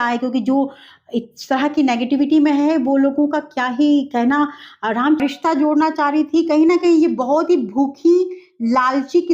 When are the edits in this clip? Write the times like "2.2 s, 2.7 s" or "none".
5.2 s